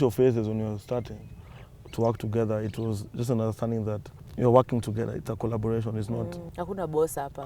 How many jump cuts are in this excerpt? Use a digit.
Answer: 2